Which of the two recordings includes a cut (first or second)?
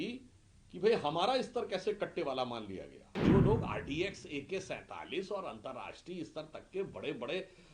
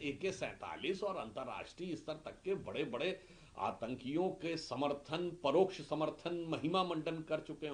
first